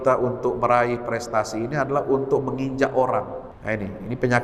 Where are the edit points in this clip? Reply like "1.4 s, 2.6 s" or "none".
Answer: 3.5 s